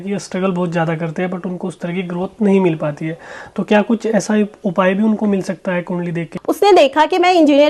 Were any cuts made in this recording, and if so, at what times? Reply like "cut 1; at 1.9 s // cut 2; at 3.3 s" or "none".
cut 1; at 6.3 s